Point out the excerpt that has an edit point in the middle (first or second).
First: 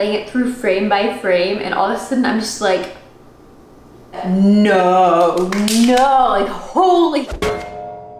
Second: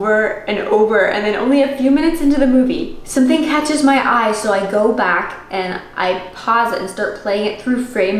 second